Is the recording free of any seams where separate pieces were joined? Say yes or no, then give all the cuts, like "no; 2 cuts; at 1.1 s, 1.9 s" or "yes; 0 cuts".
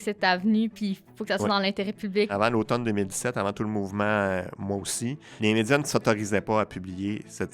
no; 2 cuts; at 2.3 s, 5.3 s